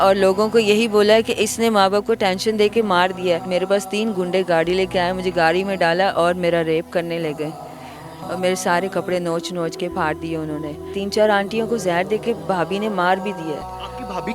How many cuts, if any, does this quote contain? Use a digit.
2